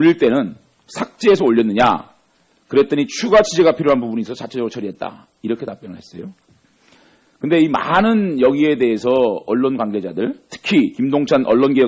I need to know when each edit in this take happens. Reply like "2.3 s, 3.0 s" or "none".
3.5 s